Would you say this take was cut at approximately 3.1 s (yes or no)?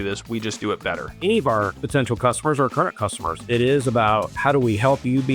no